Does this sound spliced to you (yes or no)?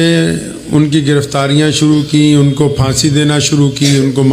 no